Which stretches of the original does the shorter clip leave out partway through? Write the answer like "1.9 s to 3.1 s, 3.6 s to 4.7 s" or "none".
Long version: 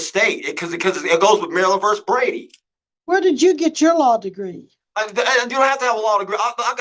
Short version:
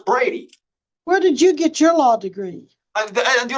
none